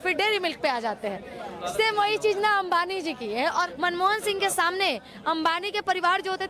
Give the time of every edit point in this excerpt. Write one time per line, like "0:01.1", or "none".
0:03.7